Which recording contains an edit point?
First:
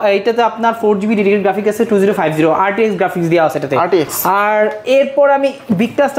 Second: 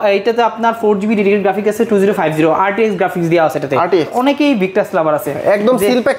second; 1 cut; at 4.1 s

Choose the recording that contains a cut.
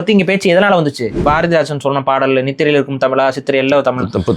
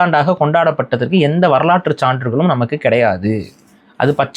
first; 1 cut; at 1.2 s

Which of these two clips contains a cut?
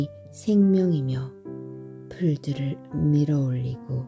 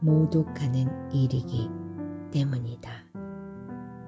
second; 1 cut; at 3.2 s

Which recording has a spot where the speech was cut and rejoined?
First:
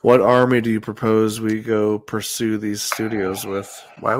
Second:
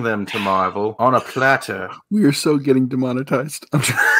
second; 1 cut; at 0.9 s

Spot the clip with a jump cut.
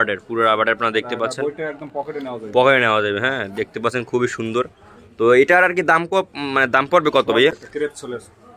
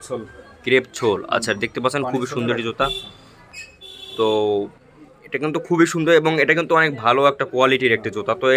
first; 1 cut; at 7.5 s

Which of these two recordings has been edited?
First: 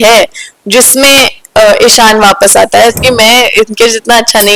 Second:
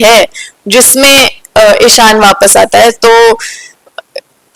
first; 1 cut; at 3.0 s

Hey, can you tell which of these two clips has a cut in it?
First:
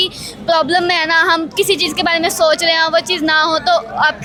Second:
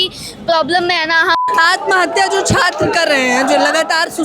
second; 1 cut; at 1.4 s

